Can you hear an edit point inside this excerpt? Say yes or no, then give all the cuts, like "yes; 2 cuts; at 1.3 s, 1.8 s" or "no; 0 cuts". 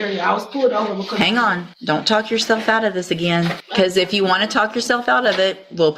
yes; 2 cuts; at 1.7 s, 3.6 s